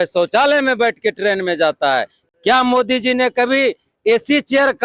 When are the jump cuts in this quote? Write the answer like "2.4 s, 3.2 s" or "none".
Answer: none